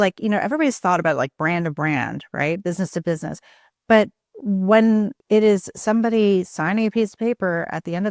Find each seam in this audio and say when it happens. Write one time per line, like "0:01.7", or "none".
0:05.2